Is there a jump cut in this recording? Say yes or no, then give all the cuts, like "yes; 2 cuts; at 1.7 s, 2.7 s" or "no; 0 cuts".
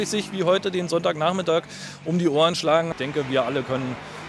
yes; 1 cut; at 2.9 s